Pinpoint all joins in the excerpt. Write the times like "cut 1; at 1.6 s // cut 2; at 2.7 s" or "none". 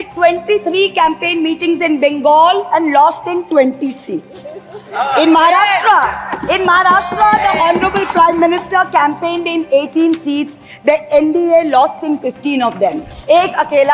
none

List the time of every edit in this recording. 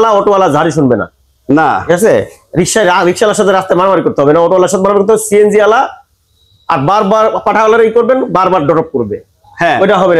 none

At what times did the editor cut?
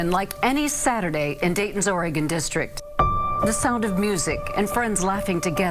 none

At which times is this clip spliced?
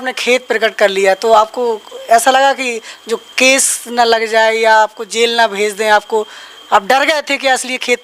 none

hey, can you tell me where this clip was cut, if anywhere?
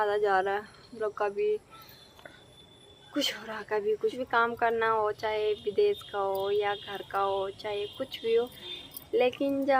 cut 1; at 4.2 s

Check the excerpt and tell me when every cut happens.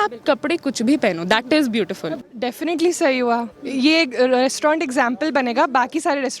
cut 1; at 2.2 s

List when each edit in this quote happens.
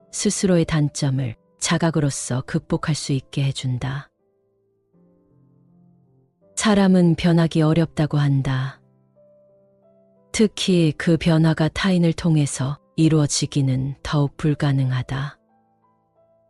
none

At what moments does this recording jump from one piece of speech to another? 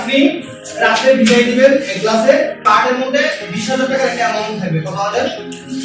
cut 1; at 2.6 s

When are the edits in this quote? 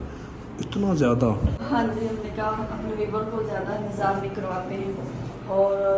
cut 1; at 1.5 s

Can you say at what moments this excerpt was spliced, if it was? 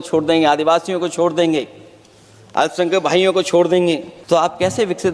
cut 1; at 4.1 s

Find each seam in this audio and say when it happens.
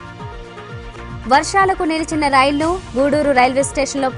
cut 1; at 0.9 s

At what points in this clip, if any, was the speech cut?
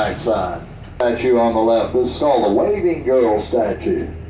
cut 1; at 1.0 s

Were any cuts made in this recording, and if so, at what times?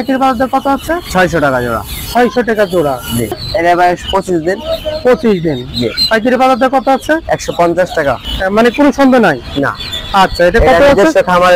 cut 1; at 3.4 s // cut 2; at 8.2 s

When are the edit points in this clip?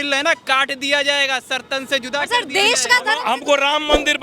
cut 1; at 3.2 s

